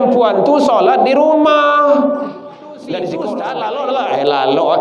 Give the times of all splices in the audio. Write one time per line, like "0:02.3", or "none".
0:03.4